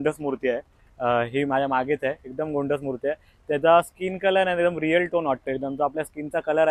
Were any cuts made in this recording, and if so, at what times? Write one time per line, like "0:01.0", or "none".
none